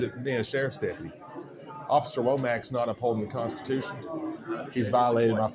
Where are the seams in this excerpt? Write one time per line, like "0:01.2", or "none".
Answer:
none